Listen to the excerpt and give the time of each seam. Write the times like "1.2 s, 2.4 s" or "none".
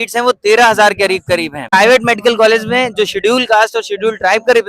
1.7 s